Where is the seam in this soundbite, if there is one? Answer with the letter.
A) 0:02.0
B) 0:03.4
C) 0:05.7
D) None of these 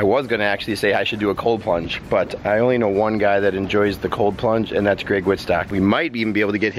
C